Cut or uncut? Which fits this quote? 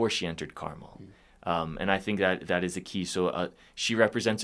uncut